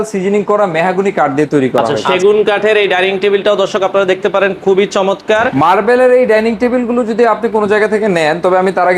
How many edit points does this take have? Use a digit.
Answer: 2